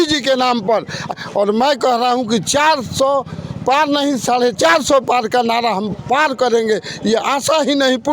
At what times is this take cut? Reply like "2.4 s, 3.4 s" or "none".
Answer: 1.1 s